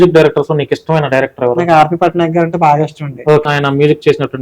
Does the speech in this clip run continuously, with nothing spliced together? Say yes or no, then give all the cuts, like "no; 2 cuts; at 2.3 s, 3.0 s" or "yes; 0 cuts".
no; 1 cut; at 3.4 s